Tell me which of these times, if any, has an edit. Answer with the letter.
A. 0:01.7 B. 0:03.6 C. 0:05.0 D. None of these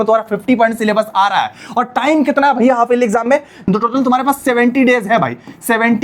B